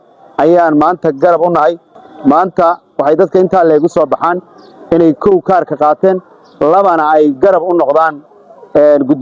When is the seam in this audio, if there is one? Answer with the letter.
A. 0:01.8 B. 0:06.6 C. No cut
A